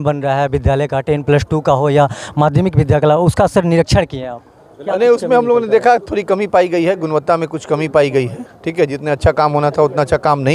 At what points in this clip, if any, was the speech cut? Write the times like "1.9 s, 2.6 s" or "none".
none